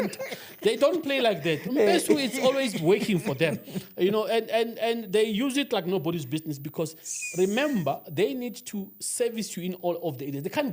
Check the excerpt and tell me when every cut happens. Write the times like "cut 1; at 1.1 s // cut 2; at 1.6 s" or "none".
none